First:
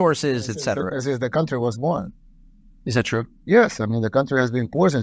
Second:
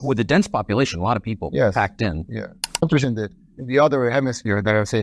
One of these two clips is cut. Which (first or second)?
second